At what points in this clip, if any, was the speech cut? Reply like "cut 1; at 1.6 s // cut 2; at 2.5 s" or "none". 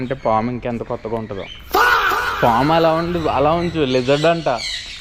none